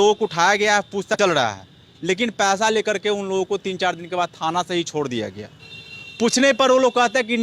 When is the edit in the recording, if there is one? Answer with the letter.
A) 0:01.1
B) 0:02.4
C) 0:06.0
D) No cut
A